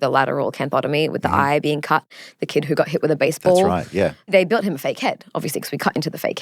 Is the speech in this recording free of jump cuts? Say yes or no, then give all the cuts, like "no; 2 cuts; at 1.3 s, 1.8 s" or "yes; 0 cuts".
no; 1 cut; at 4.3 s